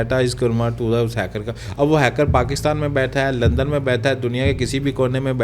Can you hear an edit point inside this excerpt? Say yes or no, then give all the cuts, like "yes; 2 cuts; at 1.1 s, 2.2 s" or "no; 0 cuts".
no; 0 cuts